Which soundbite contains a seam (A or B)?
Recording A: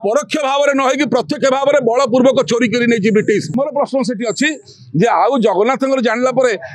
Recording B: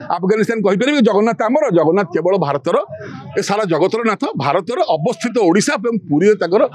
A